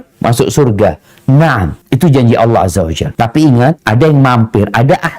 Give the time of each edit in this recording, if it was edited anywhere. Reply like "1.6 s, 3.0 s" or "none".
1.8 s, 3.0 s, 3.8 s